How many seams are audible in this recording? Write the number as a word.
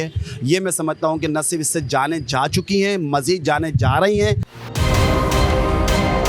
one